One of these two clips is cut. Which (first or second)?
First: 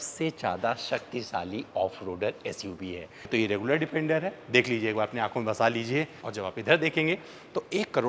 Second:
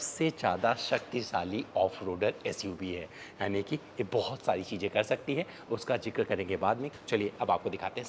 first